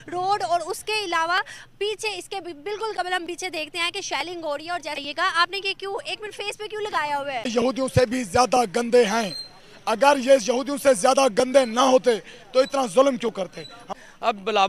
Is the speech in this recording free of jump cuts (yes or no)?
no